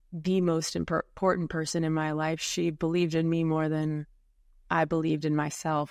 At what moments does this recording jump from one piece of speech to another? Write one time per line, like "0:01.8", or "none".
none

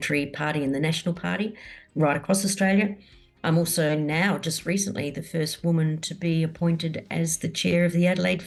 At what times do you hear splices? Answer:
none

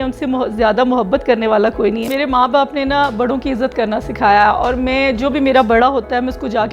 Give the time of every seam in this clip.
0:02.1

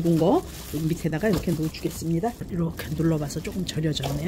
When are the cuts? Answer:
0:02.4

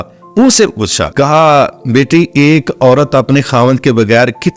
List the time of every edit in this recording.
0:01.0

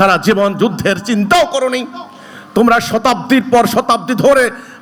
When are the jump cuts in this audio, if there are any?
none

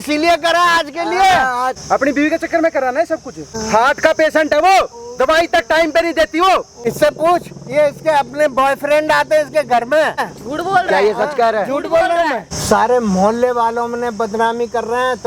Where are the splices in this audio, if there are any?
0:01.8
0:03.5
0:06.8
0:10.3
0:12.5

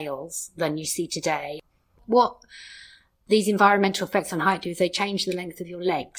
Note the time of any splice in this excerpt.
0:01.8

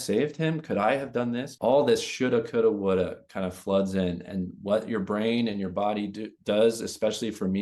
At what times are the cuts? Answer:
0:01.5

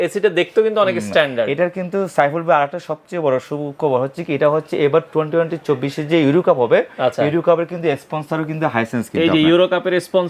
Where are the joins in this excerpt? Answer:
none

